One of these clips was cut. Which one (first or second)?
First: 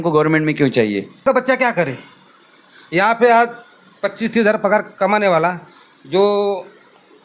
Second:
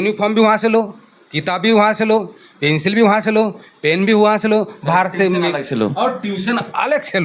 first